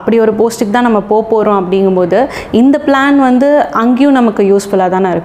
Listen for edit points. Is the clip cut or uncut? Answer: uncut